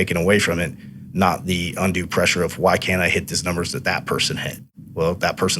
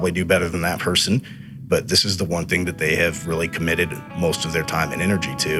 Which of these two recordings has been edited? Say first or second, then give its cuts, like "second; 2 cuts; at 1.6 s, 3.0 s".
first; 1 cut; at 4.7 s